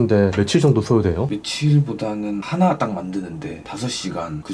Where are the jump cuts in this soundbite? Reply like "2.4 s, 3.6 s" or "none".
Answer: 1.3 s